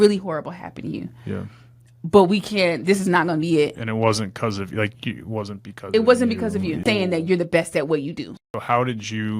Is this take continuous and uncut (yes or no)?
no